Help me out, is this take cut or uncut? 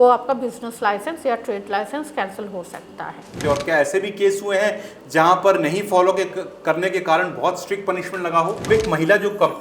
cut